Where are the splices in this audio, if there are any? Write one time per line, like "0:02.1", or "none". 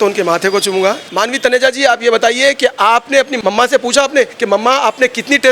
0:01.1
0:03.3
0:04.4

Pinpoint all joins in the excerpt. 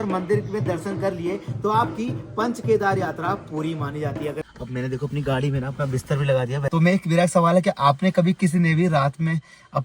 0:04.4
0:06.6

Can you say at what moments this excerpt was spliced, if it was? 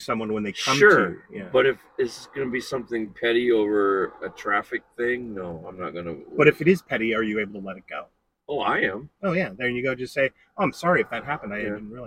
none

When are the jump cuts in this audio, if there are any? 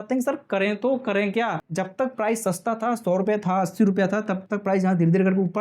0:01.6

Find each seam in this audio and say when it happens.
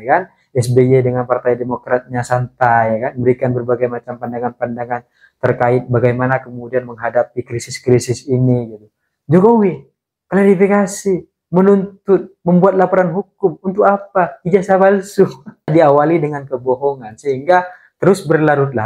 0:15.7

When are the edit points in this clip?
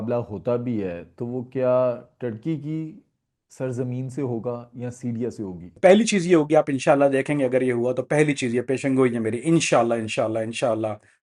0:05.7

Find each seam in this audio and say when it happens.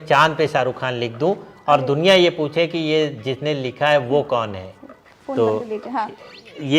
none

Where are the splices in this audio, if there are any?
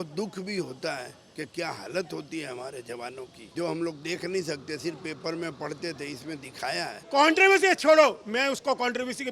0:03.4
0:07.0

